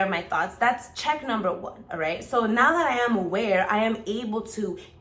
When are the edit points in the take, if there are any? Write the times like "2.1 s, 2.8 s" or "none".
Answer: none